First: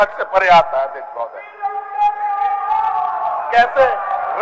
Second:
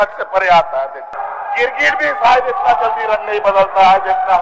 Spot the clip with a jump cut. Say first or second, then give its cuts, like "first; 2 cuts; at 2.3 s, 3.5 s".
second; 1 cut; at 1.1 s